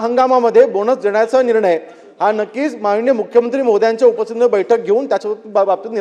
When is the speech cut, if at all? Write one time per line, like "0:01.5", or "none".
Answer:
none